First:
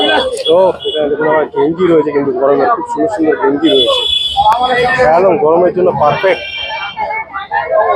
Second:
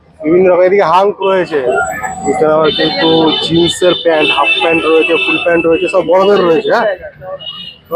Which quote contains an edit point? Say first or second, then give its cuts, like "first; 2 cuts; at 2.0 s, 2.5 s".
second; 1 cut; at 1.5 s